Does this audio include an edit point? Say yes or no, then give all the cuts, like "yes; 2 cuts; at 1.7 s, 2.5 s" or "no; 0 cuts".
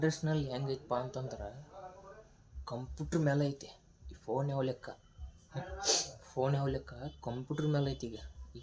no; 0 cuts